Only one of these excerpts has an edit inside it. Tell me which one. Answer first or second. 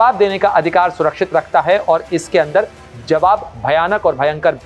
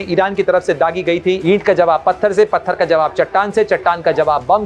second